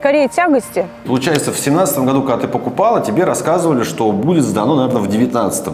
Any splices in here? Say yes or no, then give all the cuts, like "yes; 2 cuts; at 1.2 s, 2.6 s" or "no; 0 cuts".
yes; 1 cut; at 1.0 s